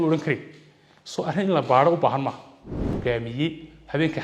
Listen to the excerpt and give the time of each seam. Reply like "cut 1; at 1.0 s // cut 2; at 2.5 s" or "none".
cut 1; at 3.0 s